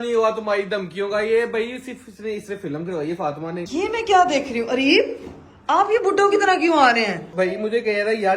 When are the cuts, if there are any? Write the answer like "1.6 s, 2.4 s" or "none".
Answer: 3.7 s, 7.2 s